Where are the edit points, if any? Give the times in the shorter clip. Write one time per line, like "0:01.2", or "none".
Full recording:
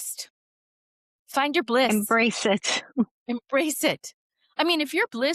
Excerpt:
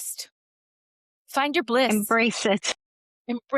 none